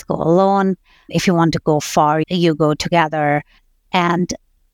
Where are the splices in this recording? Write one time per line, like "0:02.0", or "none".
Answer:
0:01.1
0:02.2
0:03.6